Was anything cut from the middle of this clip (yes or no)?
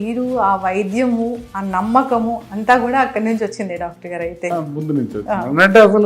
yes